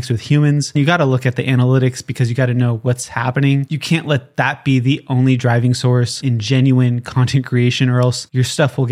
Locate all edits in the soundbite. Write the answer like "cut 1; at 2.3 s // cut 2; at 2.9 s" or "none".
cut 1; at 3.7 s // cut 2; at 6.2 s